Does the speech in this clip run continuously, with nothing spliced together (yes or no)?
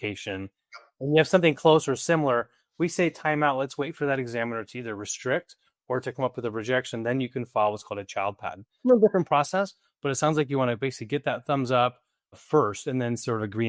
no